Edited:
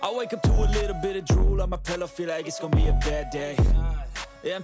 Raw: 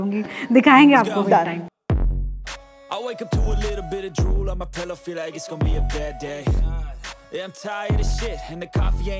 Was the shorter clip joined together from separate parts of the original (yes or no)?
no